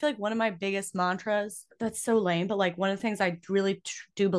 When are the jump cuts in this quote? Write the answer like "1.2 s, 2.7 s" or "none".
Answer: 1.7 s